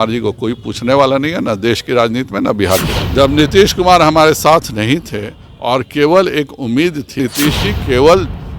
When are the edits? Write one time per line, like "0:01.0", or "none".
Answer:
0:03.0
0:07.2